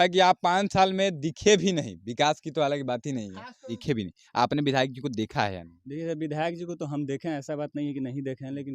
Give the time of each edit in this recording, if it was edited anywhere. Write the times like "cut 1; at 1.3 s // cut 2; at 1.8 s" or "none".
cut 1; at 3.8 s